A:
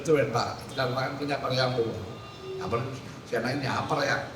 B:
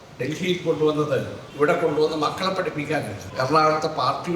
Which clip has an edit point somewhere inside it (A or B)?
B